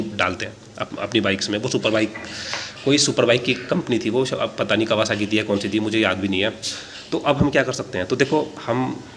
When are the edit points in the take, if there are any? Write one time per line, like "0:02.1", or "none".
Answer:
none